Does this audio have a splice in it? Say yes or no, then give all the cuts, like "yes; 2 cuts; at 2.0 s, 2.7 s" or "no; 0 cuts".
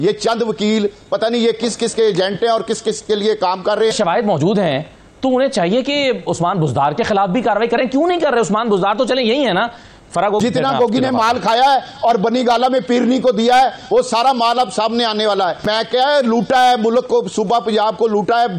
yes; 3 cuts; at 3.9 s, 10.4 s, 15.6 s